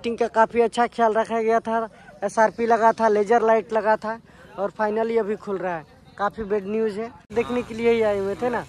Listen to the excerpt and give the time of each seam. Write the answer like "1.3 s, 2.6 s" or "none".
7.3 s